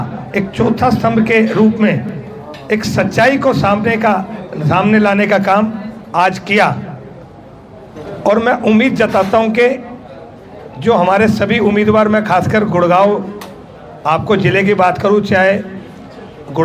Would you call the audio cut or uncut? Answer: uncut